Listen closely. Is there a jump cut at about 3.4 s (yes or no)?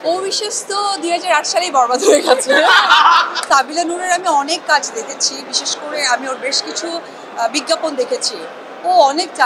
yes